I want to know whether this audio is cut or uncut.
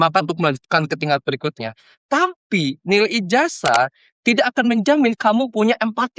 uncut